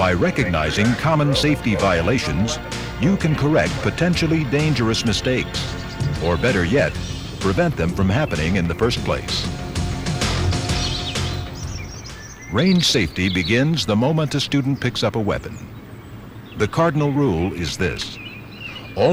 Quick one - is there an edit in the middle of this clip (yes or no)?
yes